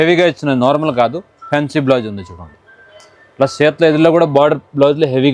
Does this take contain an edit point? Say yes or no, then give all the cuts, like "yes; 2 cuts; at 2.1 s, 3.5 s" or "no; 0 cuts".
no; 0 cuts